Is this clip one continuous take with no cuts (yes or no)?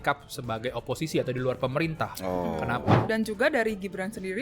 no